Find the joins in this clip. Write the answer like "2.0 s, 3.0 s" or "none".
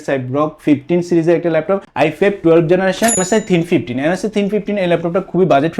1.9 s, 3.2 s